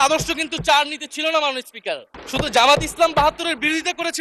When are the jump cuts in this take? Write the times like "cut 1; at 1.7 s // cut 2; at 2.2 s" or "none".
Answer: cut 1; at 2.2 s